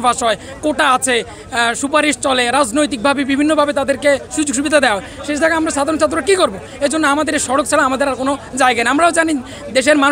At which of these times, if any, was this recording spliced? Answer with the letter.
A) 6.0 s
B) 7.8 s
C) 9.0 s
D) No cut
D